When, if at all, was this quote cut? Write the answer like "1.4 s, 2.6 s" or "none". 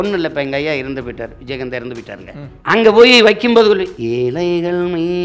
2.5 s, 3.9 s